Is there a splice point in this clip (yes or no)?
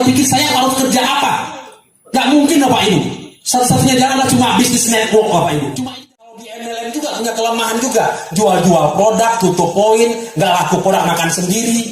yes